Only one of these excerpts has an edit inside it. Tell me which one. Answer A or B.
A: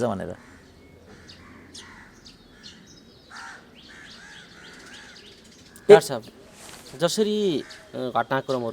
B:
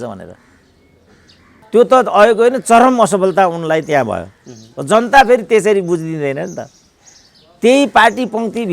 B